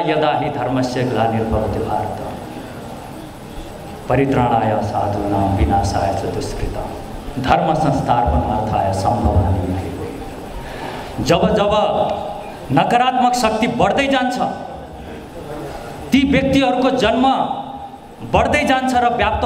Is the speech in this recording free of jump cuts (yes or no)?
no